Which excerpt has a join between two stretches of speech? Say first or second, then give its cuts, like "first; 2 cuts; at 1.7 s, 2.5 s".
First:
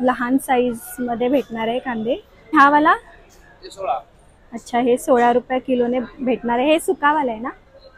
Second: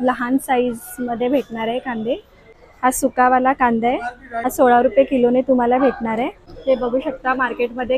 second; 3 cuts; at 2.5 s, 4.3 s, 6.5 s